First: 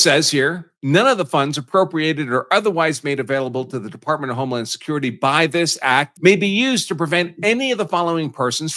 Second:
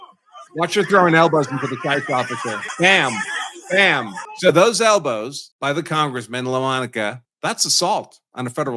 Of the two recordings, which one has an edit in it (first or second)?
first